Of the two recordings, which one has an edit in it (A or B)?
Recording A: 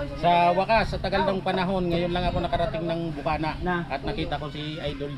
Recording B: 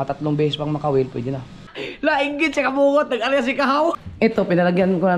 B